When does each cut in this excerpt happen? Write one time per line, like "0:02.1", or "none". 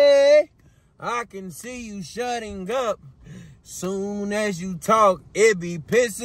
none